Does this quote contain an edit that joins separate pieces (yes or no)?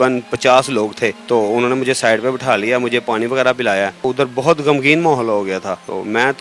no